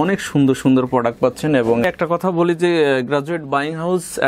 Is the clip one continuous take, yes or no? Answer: no